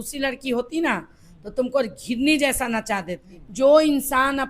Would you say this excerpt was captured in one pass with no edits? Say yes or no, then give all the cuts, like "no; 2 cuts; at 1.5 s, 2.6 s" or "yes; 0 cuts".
no; 1 cut; at 3.4 s